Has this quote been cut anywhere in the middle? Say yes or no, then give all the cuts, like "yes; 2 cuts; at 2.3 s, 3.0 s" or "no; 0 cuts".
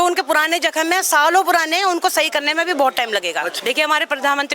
yes; 1 cut; at 3.5 s